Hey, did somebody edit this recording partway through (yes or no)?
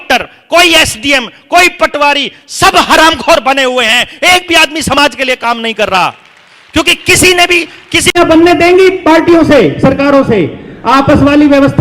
yes